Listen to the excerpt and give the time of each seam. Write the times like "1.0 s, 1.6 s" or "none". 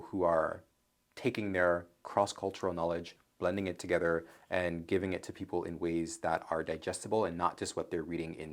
none